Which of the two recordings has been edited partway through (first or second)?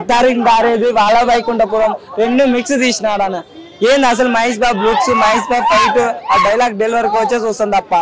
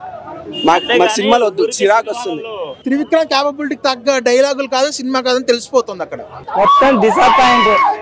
second